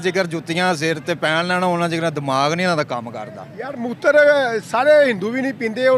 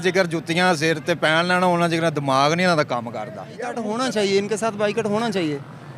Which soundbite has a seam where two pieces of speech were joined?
second; 1 cut; at 3.8 s

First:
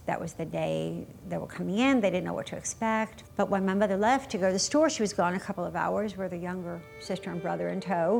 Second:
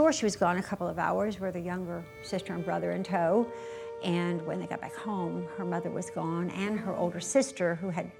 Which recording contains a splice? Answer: first; 1 cut; at 3.2 s

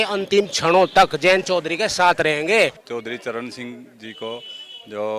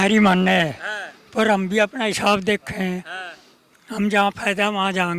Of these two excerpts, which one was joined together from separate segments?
first; 1 cut; at 2.8 s

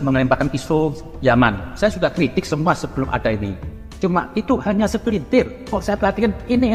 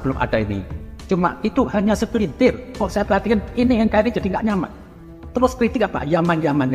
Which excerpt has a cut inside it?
first; 1 cut; at 1.7 s

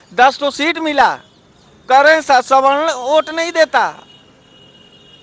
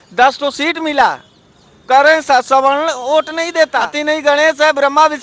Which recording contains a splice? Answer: second; 1 cut; at 3.9 s

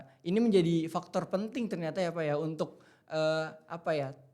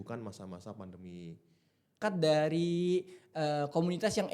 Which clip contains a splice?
second; 1 cut; at 2.0 s

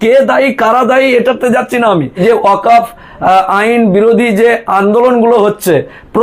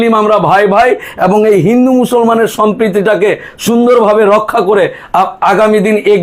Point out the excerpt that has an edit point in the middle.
first; 1 cut; at 2.2 s

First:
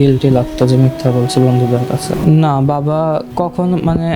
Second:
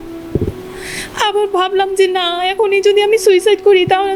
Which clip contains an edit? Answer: first; 2 cuts; at 2.1 s, 3.3 s

